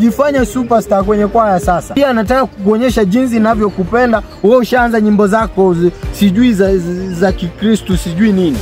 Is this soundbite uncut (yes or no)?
no